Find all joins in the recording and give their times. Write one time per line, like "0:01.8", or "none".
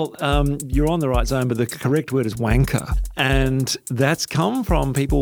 0:03.0